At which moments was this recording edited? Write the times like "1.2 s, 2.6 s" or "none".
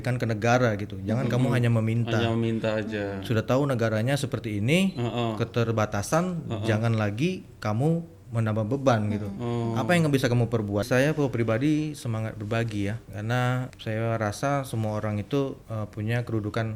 10.9 s, 13.2 s, 15.6 s